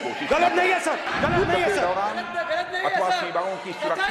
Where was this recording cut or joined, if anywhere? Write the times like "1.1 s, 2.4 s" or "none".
1.1 s